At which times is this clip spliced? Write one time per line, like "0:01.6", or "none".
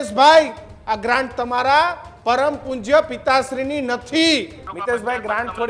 0:04.6